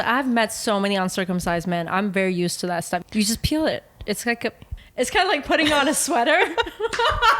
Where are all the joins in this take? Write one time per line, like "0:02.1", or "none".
0:03.0
0:04.7